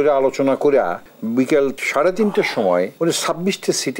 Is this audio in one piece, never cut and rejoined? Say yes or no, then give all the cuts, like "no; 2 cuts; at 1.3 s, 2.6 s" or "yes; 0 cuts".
no; 3 cuts; at 1.1 s, 1.8 s, 2.9 s